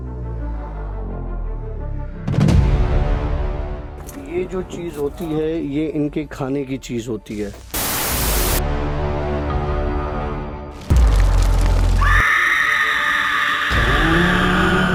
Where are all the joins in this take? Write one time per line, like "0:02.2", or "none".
none